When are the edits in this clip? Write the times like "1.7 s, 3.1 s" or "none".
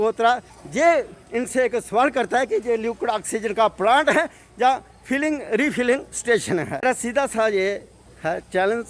6.8 s